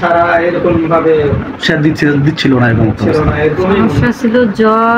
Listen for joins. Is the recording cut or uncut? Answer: cut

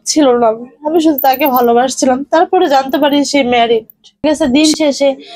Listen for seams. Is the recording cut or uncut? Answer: cut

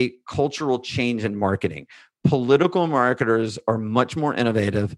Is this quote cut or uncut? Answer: uncut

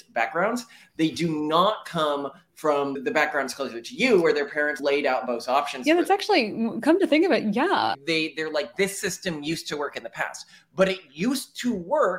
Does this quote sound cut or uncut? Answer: cut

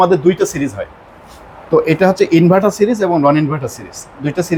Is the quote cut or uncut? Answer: uncut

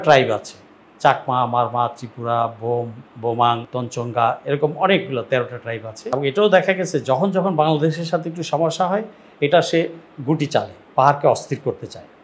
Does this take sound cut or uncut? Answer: cut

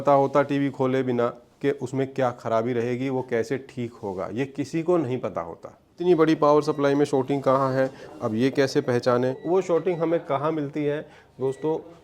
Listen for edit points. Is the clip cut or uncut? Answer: cut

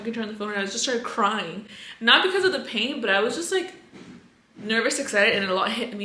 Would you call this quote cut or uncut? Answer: uncut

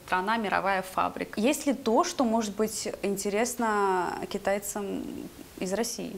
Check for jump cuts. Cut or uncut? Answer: cut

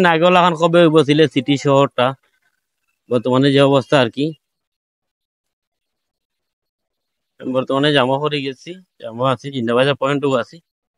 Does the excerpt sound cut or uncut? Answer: uncut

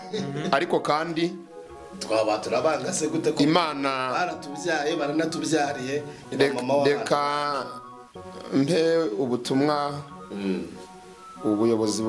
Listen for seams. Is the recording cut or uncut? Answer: uncut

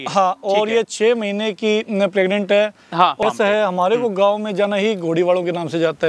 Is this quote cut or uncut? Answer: cut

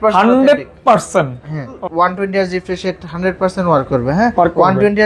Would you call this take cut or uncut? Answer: cut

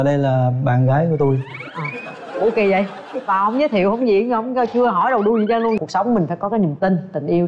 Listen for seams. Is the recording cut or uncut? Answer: cut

